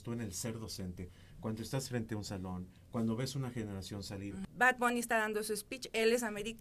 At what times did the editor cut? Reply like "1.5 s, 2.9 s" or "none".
4.4 s